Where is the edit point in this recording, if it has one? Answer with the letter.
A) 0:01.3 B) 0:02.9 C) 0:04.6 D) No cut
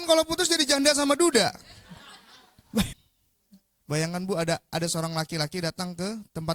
B